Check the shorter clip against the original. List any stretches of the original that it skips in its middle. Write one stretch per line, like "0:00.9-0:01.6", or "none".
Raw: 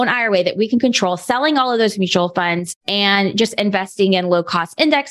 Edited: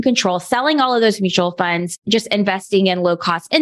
0:02.8-0:03.3